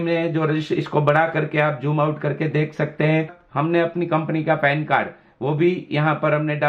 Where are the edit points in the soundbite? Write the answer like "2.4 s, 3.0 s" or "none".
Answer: 3.4 s